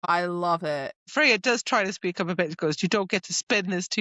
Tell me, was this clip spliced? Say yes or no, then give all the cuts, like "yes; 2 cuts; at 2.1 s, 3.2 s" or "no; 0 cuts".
yes; 1 cut; at 1.1 s